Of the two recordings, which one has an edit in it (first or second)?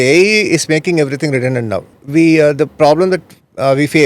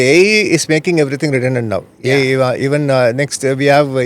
first